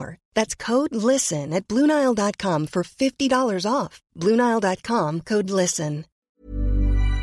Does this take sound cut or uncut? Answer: cut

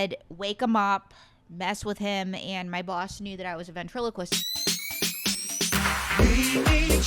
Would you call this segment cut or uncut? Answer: cut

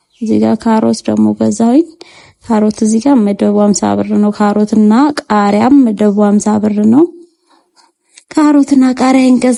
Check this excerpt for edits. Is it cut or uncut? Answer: uncut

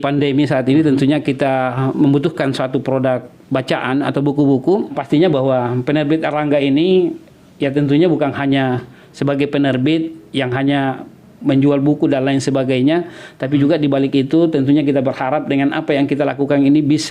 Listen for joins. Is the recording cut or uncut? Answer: cut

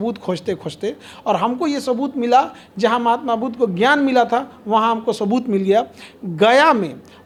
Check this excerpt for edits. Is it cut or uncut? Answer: uncut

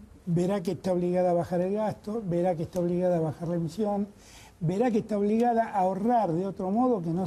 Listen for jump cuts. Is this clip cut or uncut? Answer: uncut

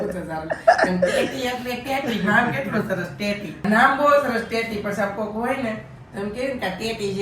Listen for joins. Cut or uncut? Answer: cut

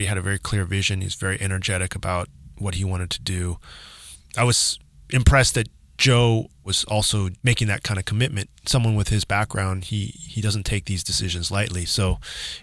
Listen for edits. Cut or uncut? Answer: uncut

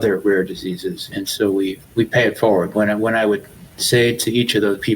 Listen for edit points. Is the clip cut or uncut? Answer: cut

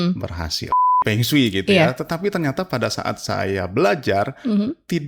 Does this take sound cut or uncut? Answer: cut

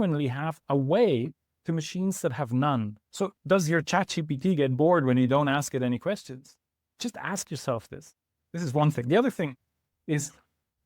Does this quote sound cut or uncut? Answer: cut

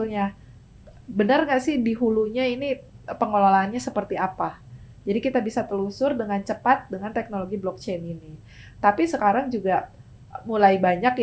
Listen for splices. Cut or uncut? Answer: uncut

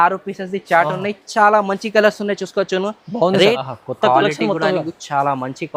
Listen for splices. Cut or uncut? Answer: cut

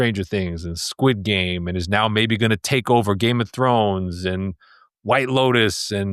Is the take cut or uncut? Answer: uncut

